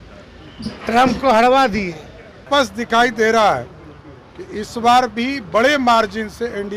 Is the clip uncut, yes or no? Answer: no